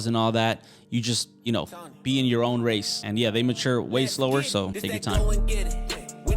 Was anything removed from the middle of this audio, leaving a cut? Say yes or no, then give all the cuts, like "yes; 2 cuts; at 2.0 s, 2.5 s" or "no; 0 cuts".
yes; 2 cuts; at 3.0 s, 4.7 s